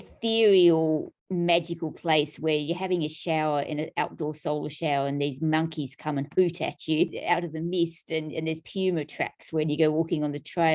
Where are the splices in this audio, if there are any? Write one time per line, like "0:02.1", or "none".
0:01.2
0:07.2